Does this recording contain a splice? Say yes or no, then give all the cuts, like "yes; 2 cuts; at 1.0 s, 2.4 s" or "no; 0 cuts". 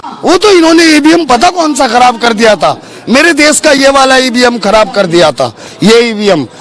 no; 0 cuts